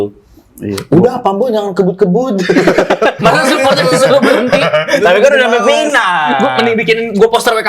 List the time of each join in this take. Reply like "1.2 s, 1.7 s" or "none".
3.2 s